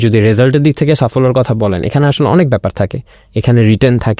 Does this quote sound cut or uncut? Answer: uncut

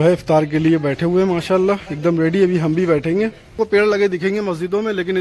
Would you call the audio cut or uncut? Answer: cut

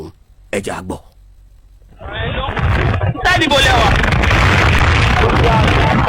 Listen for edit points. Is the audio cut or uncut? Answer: uncut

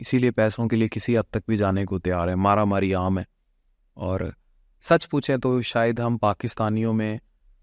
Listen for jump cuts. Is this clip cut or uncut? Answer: uncut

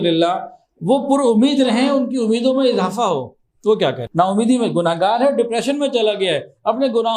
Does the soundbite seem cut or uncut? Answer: cut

